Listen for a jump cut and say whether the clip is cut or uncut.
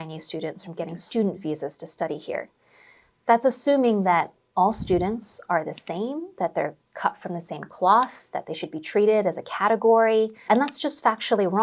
cut